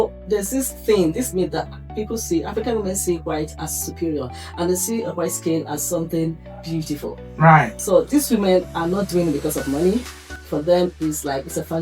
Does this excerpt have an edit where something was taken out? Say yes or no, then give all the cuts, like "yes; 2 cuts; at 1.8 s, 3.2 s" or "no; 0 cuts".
yes; 2 cuts; at 7.8 s, 10.5 s